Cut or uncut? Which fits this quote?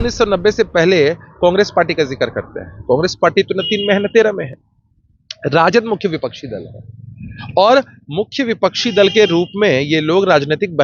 uncut